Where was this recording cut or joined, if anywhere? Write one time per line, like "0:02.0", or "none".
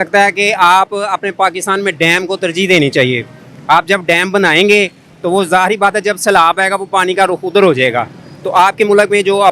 none